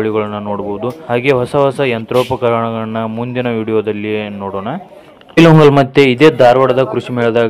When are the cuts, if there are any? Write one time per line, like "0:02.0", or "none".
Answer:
0:01.0
0:05.4